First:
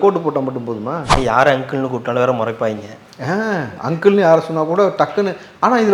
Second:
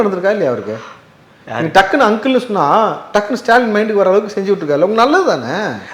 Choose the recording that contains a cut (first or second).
first